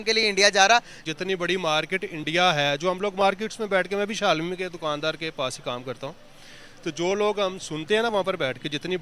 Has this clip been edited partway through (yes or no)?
yes